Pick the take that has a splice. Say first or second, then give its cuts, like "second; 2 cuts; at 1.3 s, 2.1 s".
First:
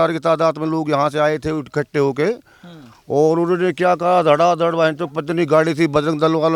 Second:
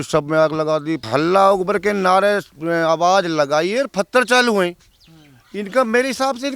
second; 1 cut; at 1.0 s